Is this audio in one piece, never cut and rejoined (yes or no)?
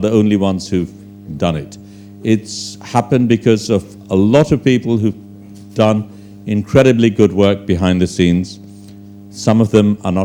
yes